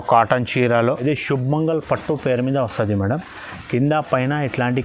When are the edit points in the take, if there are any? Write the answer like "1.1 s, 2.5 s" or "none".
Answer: 0.9 s